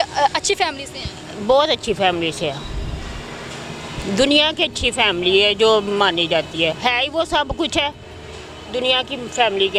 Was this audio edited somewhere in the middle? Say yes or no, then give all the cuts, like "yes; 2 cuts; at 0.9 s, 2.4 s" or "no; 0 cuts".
no; 0 cuts